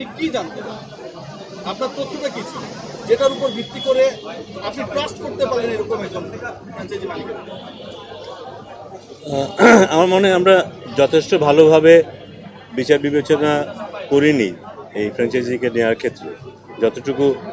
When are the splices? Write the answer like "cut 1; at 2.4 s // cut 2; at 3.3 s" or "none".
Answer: none